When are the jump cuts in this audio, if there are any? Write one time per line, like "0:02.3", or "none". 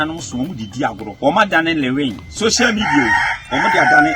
0:01.1
0:02.3

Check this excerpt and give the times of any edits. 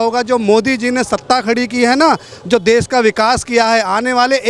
none

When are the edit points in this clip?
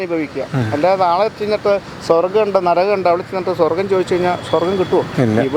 none

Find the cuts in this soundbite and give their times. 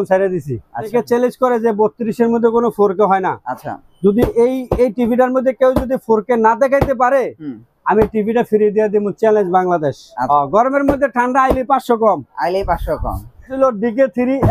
0:00.9
0:10.2
0:13.6

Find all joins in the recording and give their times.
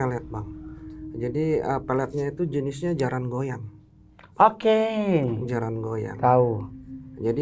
none

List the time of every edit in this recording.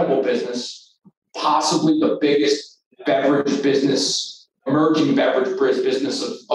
0:04.6

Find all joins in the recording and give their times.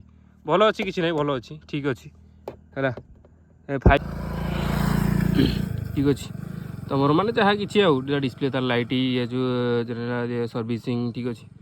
0:04.0

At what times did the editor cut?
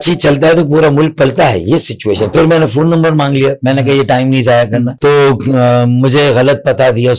0:02.3
0:04.9

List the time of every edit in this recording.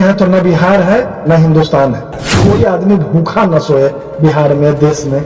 0:02.3

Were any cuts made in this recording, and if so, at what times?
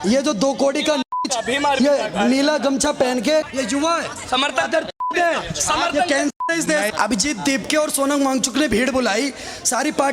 0:03.5
0:06.9

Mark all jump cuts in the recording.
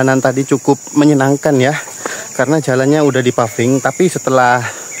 none

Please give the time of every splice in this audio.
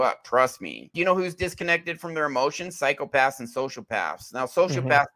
0:00.9

